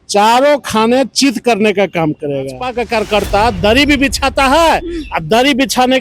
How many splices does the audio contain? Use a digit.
1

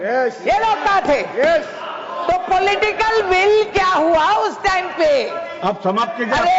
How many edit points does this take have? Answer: 0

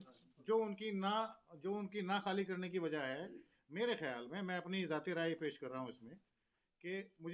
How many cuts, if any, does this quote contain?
0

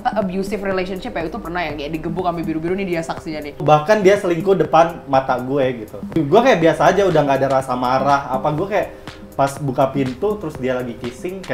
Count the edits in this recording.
2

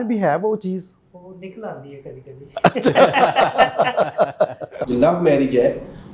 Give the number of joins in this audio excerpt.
1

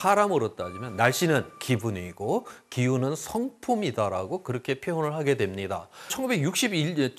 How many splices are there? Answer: 1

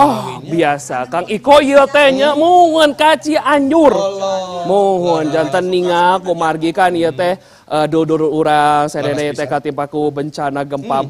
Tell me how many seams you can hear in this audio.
0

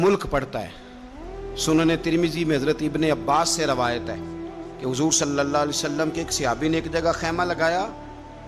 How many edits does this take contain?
0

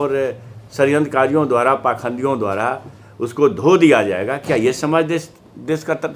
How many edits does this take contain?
0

